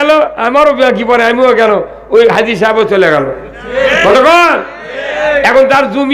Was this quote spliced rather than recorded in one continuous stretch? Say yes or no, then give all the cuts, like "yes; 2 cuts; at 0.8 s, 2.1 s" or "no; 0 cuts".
no; 0 cuts